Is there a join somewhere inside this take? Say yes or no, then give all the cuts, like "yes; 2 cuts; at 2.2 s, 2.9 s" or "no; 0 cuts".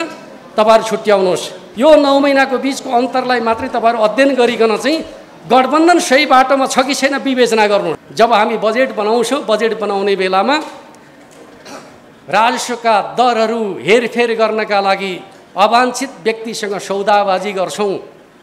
yes; 2 cuts; at 1.6 s, 8.0 s